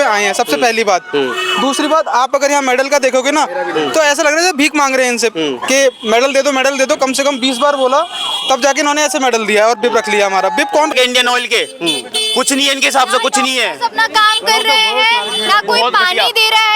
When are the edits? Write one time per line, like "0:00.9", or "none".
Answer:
0:10.9